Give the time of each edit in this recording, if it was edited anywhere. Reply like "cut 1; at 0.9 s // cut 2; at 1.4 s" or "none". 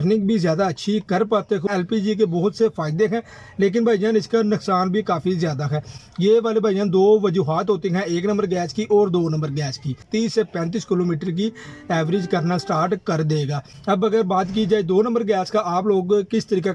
cut 1; at 1.7 s // cut 2; at 5.9 s // cut 3; at 10.0 s // cut 4; at 13.7 s